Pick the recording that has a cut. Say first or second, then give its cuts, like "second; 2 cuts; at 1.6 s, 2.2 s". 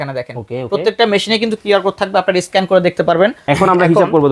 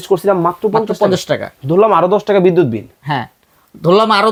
first; 1 cut; at 3.4 s